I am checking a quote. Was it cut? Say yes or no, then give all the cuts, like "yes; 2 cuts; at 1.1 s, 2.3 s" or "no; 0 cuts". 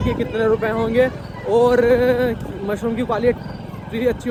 no; 0 cuts